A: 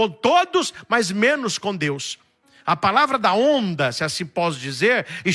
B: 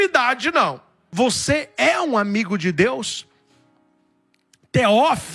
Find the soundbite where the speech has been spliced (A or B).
B